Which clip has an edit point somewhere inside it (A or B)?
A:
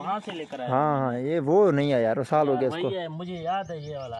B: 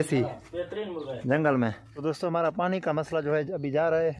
B